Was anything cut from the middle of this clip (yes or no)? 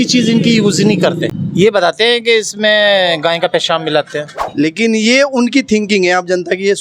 yes